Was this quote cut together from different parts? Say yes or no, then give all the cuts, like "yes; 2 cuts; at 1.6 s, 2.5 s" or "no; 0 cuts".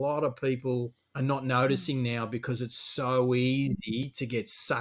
yes; 1 cut; at 1.0 s